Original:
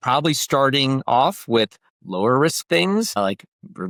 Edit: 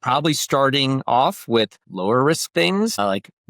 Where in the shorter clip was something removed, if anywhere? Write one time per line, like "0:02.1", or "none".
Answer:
0:01.8